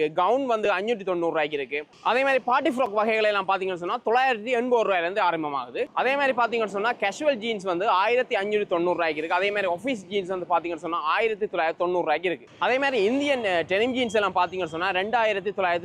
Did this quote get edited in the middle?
no; 0 cuts

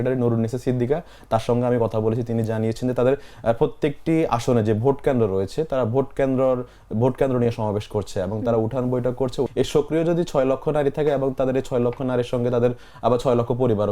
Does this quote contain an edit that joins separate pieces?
yes; 1 cut; at 9.5 s

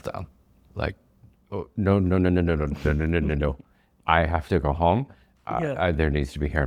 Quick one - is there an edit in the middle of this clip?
no; 0 cuts

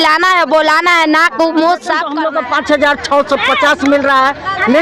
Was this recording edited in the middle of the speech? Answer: yes; 1 cut; at 2.1 s

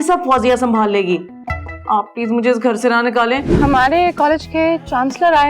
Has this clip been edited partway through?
yes; 1 cut; at 3.5 s

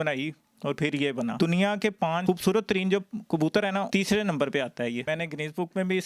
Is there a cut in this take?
yes; 2 cuts; at 1.3 s, 5.0 s

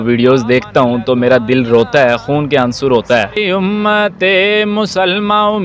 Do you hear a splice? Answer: yes; 1 cut; at 3.3 s

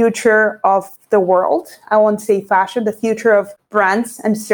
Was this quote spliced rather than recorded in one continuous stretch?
yes; 2 cuts; at 0.9 s, 3.6 s

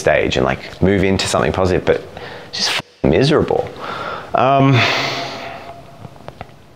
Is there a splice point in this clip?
no; 0 cuts

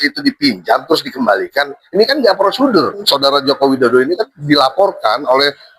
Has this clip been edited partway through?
yes; 1 cut; at 3.0 s

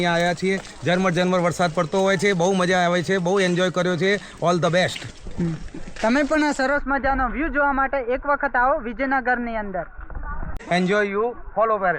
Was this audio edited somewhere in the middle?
yes; 1 cut; at 10.6 s

